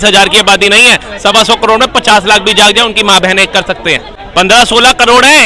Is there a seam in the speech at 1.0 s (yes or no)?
no